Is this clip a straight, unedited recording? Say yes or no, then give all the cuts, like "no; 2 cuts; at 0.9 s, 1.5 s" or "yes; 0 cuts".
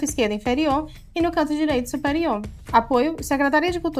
no; 1 cut; at 2.5 s